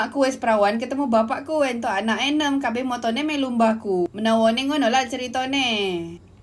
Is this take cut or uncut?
uncut